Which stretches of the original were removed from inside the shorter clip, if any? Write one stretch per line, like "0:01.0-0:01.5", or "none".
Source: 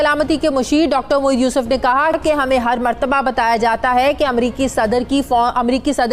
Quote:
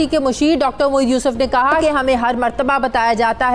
0:02.1-0:02.2